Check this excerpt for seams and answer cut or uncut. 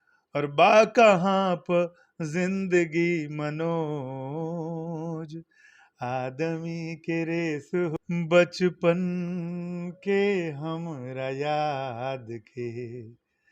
cut